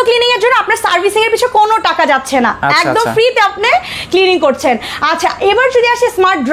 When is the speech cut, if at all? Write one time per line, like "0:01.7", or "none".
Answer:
none